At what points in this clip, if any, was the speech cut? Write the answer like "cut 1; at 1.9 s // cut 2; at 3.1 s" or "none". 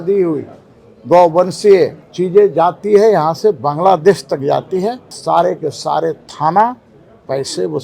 cut 1; at 2.0 s // cut 2; at 5.1 s